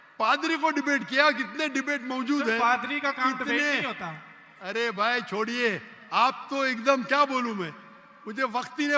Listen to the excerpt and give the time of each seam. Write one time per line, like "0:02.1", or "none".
none